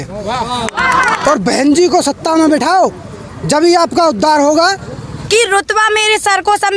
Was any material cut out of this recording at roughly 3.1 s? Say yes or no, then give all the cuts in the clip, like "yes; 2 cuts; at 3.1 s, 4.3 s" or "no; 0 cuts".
no; 2 cuts; at 1.1 s, 5.1 s